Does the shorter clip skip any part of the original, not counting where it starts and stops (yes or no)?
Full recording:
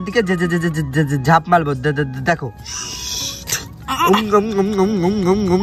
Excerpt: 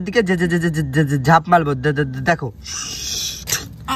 no